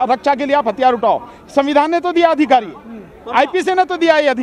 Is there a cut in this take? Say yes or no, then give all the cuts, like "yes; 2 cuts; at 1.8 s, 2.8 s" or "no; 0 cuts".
no; 0 cuts